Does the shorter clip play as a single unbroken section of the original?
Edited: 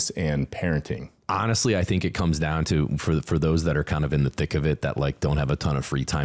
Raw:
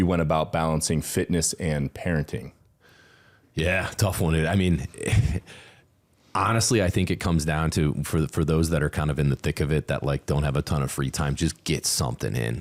no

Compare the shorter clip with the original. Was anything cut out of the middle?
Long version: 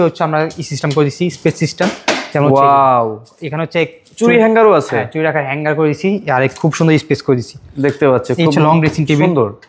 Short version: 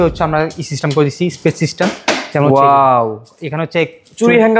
no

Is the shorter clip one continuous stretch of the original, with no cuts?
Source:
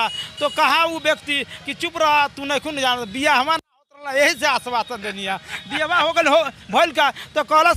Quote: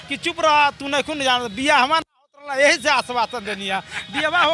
yes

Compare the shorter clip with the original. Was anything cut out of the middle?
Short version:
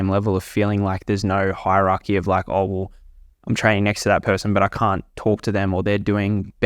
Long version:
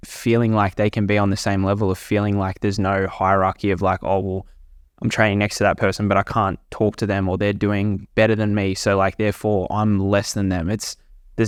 no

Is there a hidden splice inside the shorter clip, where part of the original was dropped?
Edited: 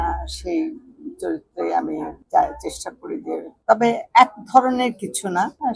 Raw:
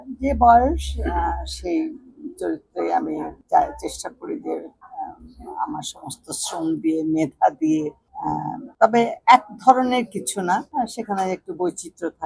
yes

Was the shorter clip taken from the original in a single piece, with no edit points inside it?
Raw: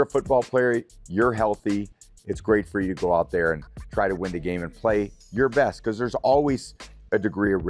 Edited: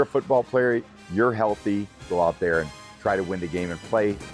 no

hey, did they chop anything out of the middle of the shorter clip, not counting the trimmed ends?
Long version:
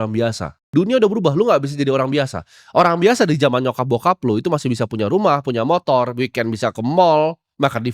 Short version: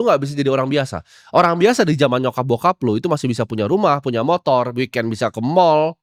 no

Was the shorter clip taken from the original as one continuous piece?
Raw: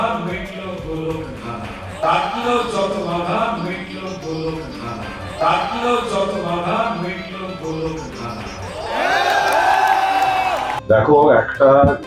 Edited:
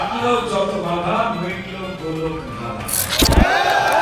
no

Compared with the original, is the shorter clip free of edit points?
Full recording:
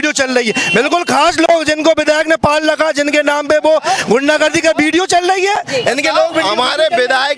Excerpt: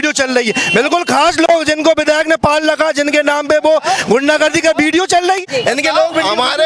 no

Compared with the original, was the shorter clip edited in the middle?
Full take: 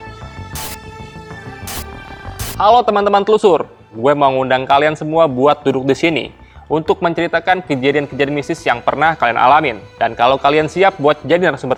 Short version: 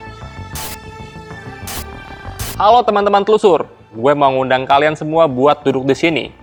no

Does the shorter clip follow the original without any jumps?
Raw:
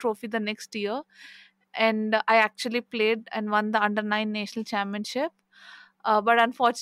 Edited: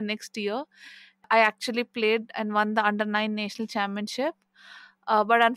no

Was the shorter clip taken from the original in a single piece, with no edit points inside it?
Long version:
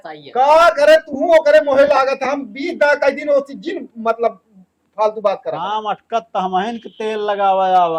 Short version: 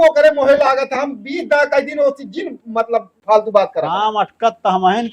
no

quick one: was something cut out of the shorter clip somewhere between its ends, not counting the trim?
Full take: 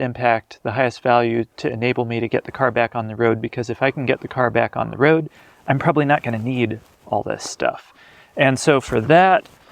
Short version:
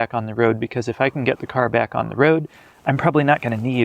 no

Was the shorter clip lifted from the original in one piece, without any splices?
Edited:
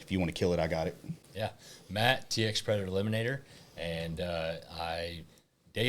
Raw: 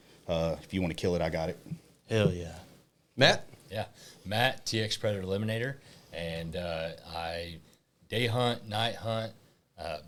no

